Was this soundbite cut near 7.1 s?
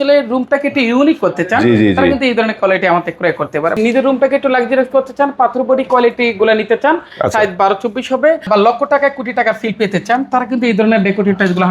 no; 2 cuts; at 3.8 s, 8.5 s

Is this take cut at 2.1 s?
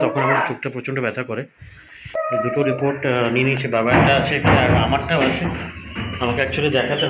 yes; 1 cut; at 2.1 s

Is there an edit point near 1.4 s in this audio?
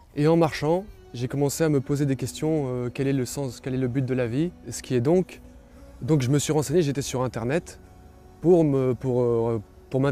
no; 1 cut; at 4.7 s

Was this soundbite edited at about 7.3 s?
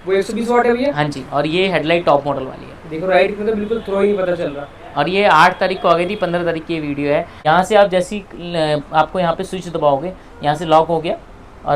yes; 1 cut; at 7.3 s

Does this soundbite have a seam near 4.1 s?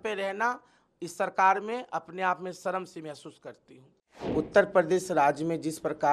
yes; 1 cut; at 4.1 s

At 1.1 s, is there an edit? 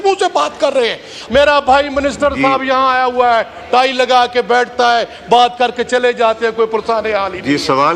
yes; 1 cut; at 1.1 s

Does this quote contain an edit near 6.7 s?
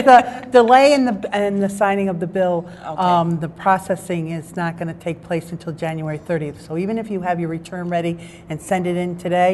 yes; 1 cut; at 6.7 s

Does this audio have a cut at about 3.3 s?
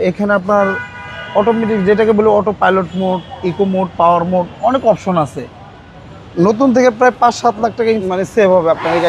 no; 2 cuts; at 6.3 s, 8.0 s

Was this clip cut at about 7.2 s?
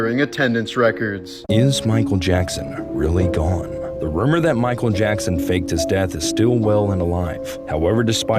no; 1 cut; at 1.3 s

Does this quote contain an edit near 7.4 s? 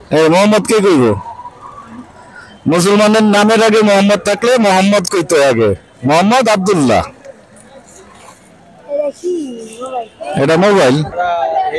no; 0 cuts

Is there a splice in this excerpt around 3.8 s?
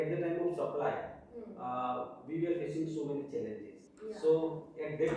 yes; 1 cut; at 3.8 s

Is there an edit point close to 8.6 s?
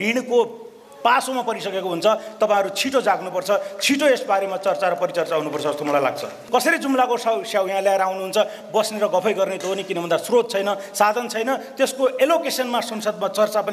yes; 2 cuts; at 6.4 s, 8.6 s

